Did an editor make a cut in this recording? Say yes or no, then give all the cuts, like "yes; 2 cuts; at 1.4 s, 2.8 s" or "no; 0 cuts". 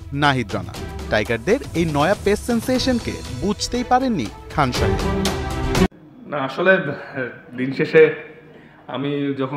yes; 1 cut; at 5.9 s